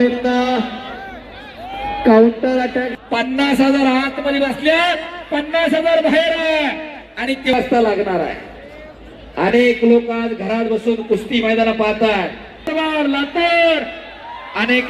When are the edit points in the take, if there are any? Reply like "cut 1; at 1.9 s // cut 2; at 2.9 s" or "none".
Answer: cut 1; at 2.9 s // cut 2; at 7.5 s // cut 3; at 12.6 s